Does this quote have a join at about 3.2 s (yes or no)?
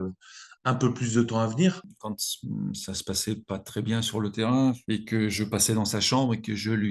no